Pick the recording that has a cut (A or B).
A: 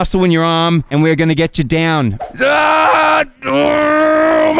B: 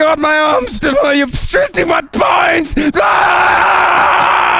A